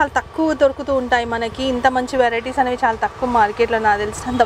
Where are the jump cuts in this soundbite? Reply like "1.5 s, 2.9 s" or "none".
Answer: none

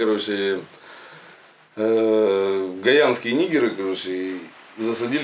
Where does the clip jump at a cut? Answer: none

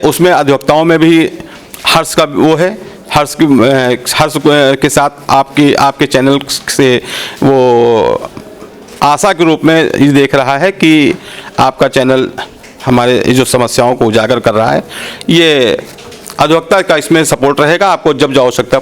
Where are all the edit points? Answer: none

